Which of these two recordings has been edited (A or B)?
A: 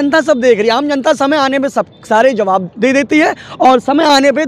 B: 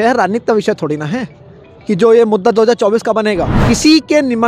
B